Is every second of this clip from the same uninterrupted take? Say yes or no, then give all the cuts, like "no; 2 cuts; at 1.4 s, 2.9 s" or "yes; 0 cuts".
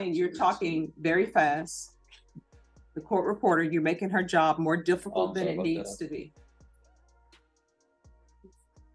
yes; 0 cuts